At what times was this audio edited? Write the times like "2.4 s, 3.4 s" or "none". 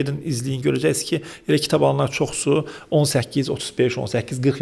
none